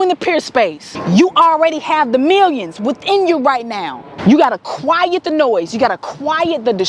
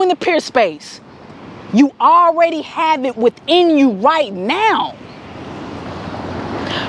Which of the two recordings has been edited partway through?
first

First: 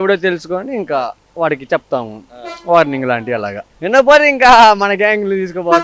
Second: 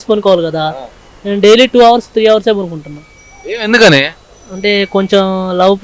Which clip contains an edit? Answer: first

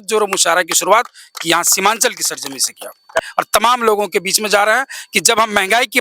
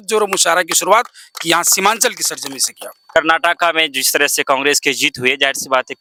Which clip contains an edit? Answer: first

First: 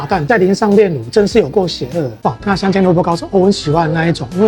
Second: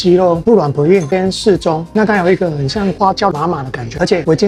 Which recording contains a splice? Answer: first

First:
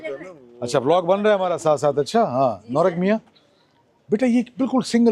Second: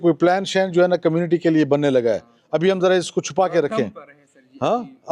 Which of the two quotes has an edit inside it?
second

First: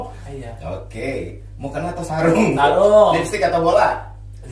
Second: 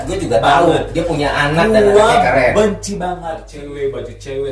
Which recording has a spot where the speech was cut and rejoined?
second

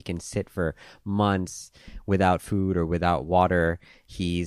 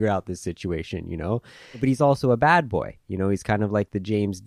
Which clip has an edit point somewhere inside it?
second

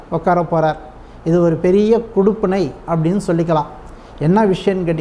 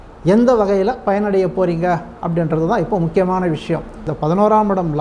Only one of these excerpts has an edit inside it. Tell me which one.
second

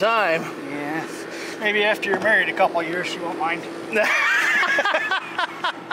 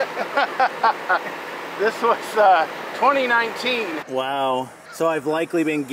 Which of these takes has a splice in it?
second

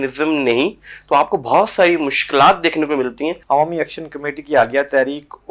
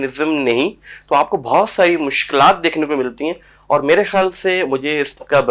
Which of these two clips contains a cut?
first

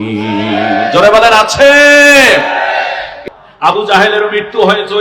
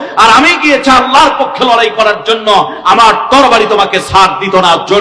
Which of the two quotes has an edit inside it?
first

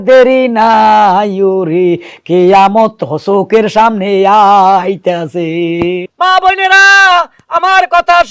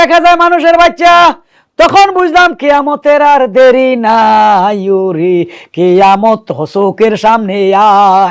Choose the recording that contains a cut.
first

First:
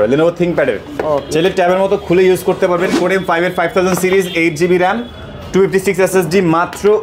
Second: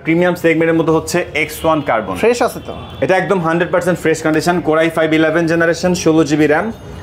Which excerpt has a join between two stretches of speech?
first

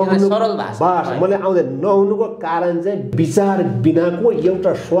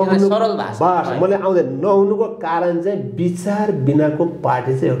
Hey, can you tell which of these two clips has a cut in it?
first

